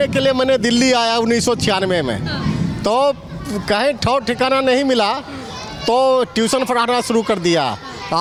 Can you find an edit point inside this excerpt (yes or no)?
no